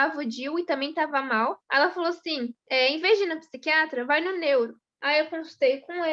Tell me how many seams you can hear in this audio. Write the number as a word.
three